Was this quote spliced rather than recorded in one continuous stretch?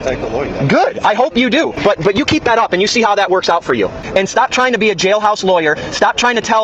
yes; 2 cuts; at 1.7 s, 4.0 s

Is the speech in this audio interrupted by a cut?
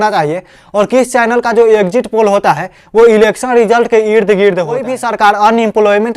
yes; 1 cut; at 5.0 s

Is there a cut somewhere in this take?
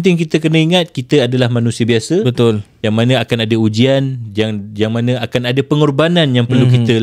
no; 0 cuts

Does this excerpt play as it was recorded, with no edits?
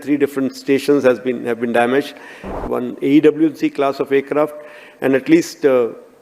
no; 1 cut; at 2.6 s

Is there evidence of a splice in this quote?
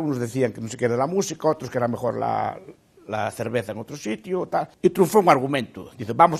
yes; 1 cut; at 4.7 s

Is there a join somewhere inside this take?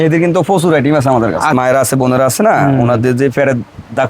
yes; 1 cut; at 1.5 s

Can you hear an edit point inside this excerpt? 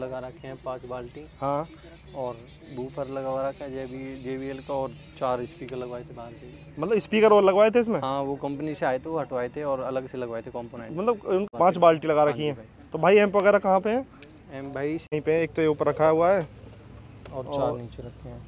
yes; 2 cuts; at 11.4 s, 15.1 s

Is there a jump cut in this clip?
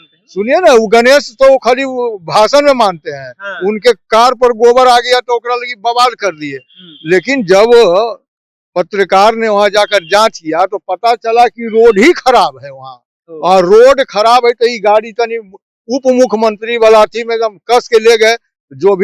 no; 0 cuts

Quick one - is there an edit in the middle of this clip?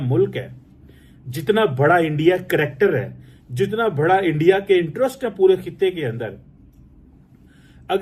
no; 0 cuts

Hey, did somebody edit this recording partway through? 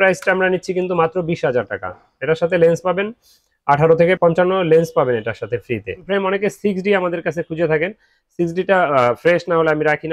yes; 2 cuts; at 4.2 s, 5.9 s

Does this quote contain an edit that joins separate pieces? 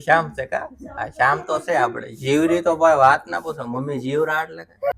no; 0 cuts

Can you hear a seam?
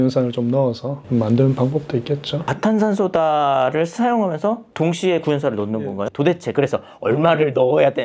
yes; 2 cuts; at 2.4 s, 6.0 s

